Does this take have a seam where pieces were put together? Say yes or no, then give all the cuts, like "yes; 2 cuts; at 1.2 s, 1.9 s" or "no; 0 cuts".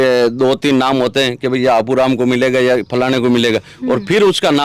no; 0 cuts